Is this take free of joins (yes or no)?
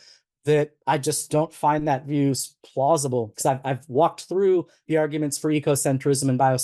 no